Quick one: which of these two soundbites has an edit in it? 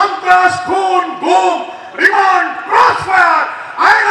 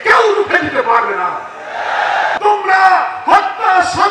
second; 1 cut; at 2.3 s

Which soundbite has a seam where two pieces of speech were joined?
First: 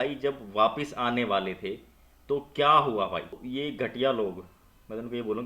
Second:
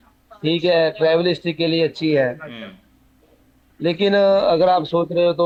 first; 1 cut; at 3.3 s

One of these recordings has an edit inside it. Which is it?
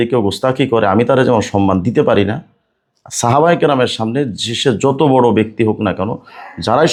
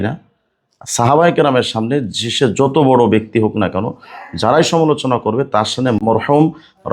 second; 1 cut; at 6.0 s

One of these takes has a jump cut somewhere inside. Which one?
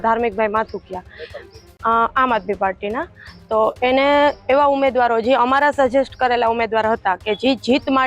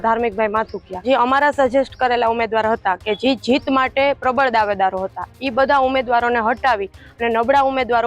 second; 1 cut; at 1.0 s

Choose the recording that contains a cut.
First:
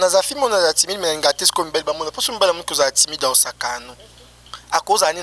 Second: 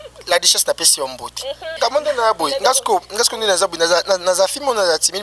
second; 1 cut; at 1.7 s

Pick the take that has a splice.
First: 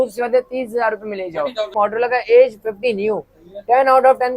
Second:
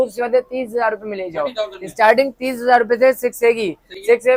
first; 1 cut; at 1.7 s

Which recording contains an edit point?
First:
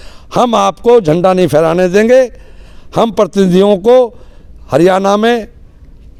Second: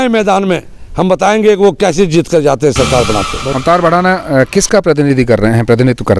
second; 1 cut; at 3.4 s

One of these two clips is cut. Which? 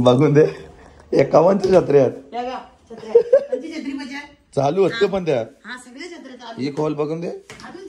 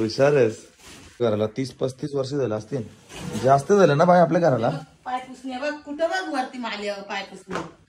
second; 1 cut; at 1.2 s

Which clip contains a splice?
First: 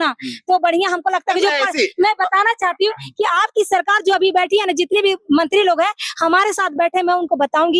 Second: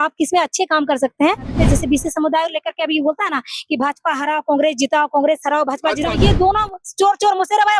second; 2 cuts; at 1.5 s, 6.1 s

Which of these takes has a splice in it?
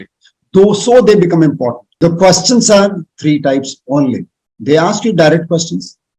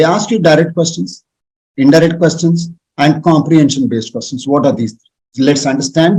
first; 1 cut; at 1.8 s

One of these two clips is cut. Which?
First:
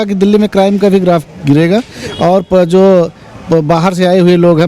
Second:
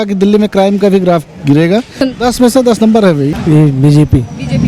second; 2 cuts; at 2.1 s, 3.4 s

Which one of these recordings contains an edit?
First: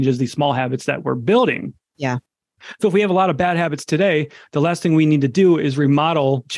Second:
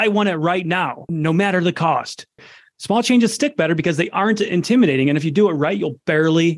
second; 2 cuts; at 1.0 s, 2.5 s

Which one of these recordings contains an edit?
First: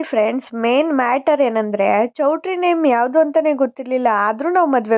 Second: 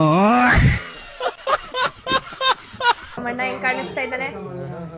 second; 1 cut; at 3.2 s

